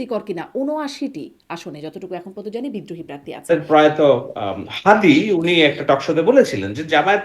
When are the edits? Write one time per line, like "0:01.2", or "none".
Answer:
0:03.5

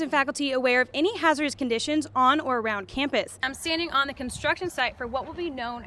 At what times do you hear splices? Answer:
0:03.5

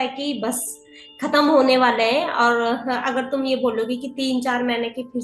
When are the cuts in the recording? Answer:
none

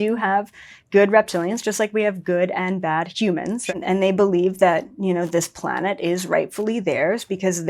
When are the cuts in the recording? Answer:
0:03.6

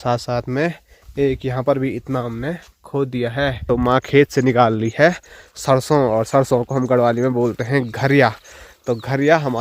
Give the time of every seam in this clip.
0:03.6

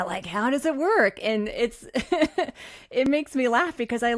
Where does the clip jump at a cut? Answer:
none

